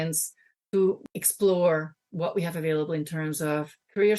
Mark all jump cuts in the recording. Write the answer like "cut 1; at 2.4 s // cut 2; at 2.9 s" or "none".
cut 1; at 1.0 s